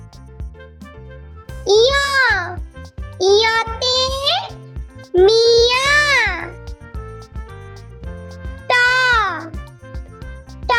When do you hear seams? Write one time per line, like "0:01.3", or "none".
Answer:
none

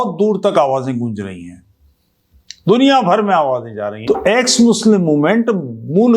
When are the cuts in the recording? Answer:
0:03.9

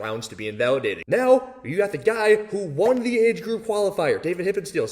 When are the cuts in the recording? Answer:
0:01.0

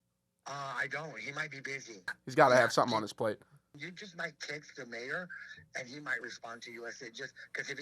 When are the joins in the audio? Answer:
0:02.1
0:03.8

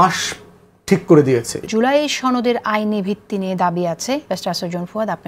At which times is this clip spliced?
0:01.7

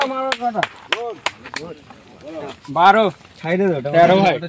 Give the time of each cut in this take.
none

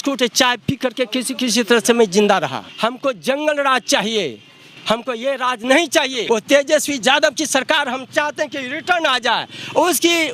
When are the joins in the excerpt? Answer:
0:02.6
0:06.2

